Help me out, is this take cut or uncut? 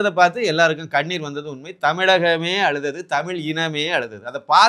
uncut